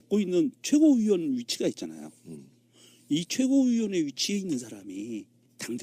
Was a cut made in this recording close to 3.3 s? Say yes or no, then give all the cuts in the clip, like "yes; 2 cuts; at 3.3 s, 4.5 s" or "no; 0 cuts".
no; 1 cut; at 1.3 s